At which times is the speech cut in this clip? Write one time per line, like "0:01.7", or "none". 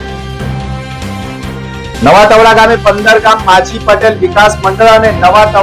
0:01.5